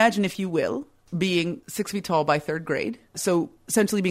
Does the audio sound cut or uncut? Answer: cut